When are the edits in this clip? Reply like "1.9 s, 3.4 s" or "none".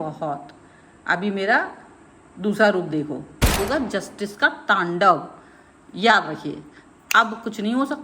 3.6 s